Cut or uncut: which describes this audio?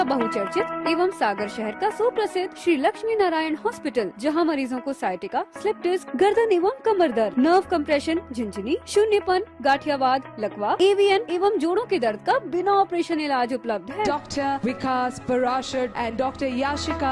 uncut